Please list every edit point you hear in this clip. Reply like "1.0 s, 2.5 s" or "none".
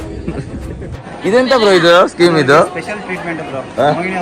1.0 s